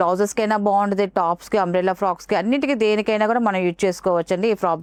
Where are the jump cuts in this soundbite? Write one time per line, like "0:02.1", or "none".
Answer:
none